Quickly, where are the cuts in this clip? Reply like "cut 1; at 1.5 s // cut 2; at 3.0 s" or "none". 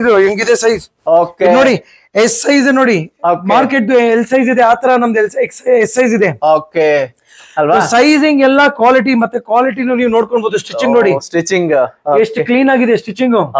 none

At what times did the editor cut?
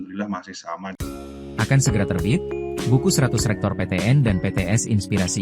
cut 1; at 1.0 s

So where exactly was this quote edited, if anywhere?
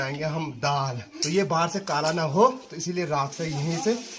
cut 1; at 1.1 s

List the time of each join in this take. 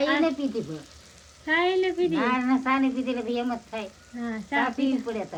none

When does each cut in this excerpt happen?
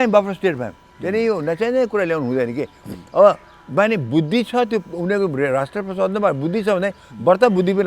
none

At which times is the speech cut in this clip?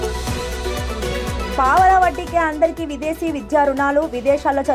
cut 1; at 1.1 s

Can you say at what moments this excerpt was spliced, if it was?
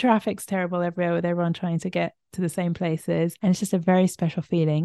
cut 1; at 3.4 s

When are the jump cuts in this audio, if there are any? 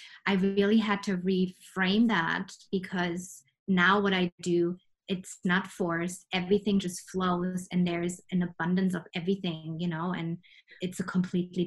none

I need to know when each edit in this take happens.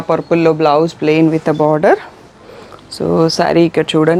none

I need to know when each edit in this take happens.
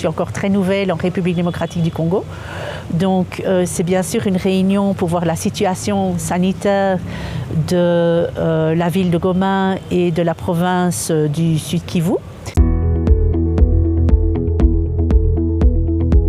cut 1; at 12.5 s

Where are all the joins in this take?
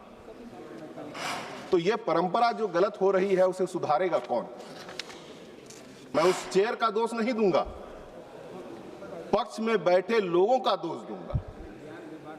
cut 1; at 6.0 s

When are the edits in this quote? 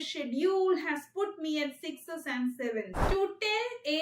cut 1; at 3.0 s

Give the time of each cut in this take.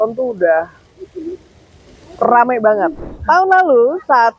cut 1; at 3.1 s

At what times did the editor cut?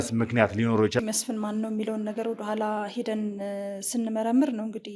cut 1; at 1.0 s

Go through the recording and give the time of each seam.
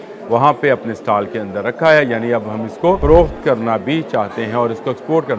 cut 1; at 3.0 s

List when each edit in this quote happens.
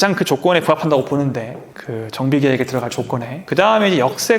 cut 1; at 3.4 s

